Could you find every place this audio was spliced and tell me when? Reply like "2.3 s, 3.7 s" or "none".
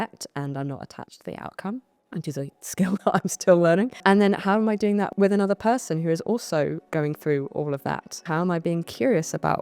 2.0 s, 3.9 s, 5.1 s, 6.8 s, 8.2 s